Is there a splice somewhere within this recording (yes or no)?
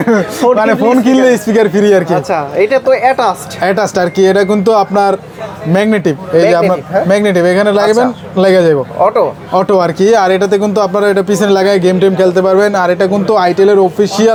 no